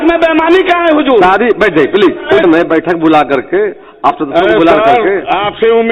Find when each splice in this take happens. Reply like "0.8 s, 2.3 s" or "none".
2.4 s